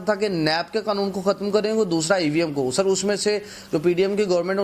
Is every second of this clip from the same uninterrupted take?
yes; 0 cuts

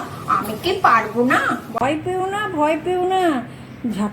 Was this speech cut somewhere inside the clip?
yes; 1 cut; at 1.7 s

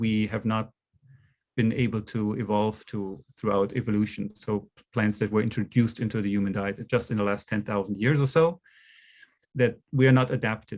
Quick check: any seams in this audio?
no; 0 cuts

